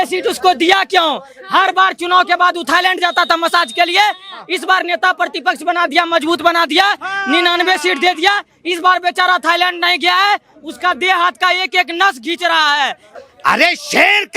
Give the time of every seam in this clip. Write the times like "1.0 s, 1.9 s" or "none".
13.1 s